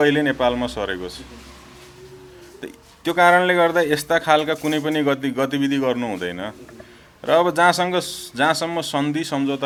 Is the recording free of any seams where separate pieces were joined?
yes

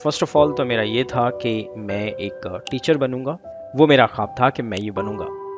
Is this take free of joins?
no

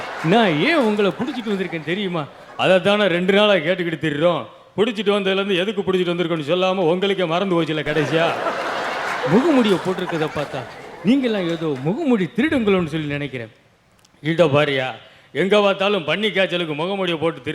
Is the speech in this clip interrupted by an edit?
no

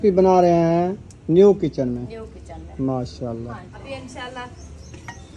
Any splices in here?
yes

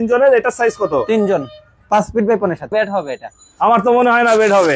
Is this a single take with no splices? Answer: no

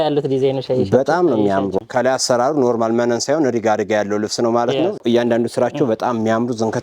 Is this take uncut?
no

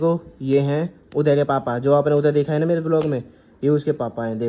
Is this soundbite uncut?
yes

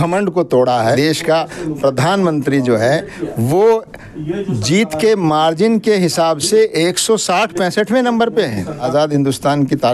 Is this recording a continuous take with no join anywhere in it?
no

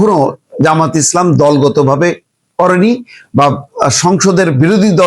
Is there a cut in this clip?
no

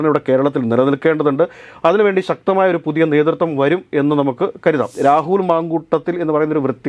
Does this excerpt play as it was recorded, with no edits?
no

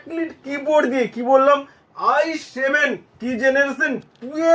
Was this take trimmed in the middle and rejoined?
no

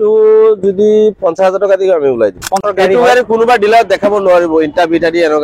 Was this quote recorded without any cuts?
no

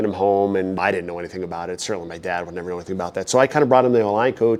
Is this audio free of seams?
yes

